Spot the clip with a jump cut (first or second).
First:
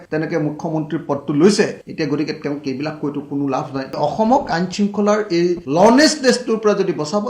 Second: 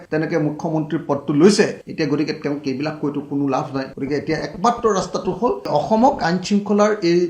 first